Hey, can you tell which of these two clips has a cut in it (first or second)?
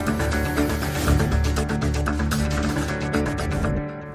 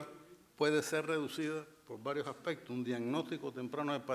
second